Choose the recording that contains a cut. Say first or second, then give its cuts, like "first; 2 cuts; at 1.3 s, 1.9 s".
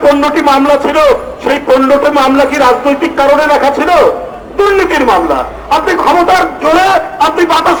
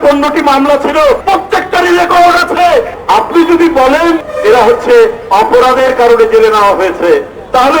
second; 3 cuts; at 1.2 s, 2.9 s, 4.2 s